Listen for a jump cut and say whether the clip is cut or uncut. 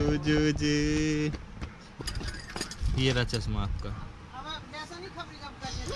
cut